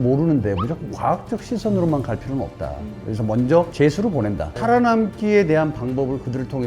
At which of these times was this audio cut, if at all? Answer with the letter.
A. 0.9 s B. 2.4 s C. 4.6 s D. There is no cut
C